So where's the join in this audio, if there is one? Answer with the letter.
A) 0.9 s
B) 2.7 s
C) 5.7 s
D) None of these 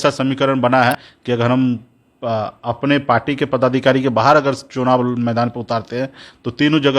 A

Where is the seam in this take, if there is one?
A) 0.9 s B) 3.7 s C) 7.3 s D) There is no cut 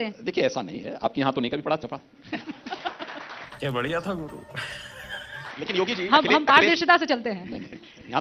D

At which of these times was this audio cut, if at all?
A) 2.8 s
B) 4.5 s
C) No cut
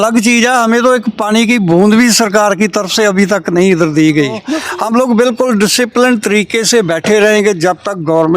B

